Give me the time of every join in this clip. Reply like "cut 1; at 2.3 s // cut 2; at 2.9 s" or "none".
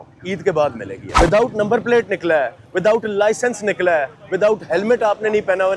cut 1; at 1.0 s